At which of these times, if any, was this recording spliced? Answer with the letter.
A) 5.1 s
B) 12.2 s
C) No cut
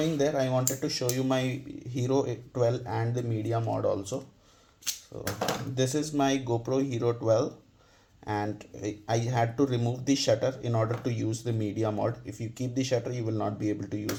C